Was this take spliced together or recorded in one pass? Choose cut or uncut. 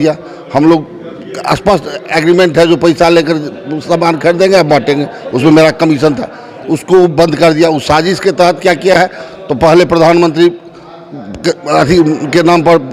uncut